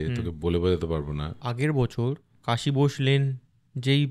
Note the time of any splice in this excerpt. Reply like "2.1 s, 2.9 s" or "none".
1.4 s